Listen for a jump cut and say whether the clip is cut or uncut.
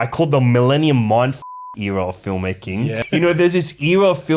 cut